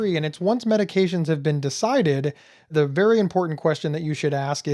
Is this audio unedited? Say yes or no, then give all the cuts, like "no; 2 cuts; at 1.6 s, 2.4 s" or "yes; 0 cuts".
no; 1 cut; at 2.7 s